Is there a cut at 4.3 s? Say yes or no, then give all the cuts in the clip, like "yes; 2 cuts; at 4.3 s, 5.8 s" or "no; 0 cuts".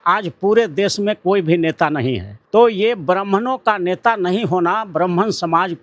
no; 1 cut; at 2.3 s